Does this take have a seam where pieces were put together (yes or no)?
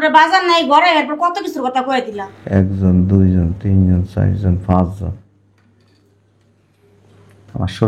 no